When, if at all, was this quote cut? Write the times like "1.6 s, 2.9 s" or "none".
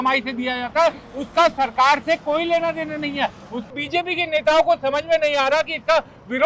3.7 s